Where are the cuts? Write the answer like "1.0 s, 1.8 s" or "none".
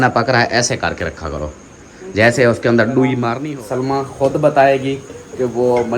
3.3 s